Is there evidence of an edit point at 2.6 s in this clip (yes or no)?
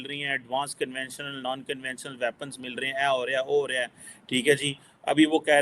no